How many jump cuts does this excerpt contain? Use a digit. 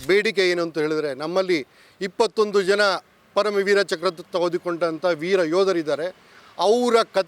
0